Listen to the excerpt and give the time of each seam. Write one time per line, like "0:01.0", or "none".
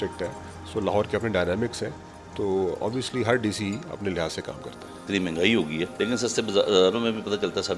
0:05.0
0:05.9